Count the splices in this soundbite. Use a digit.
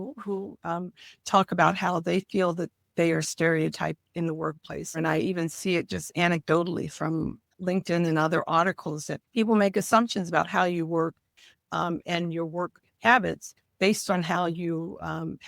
3